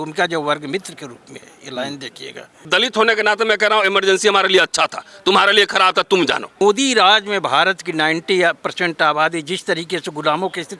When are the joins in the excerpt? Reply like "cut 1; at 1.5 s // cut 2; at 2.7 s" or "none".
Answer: cut 1; at 2.6 s // cut 2; at 6.6 s